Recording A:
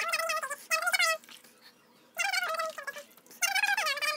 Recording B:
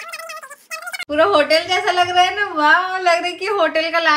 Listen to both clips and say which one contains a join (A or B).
B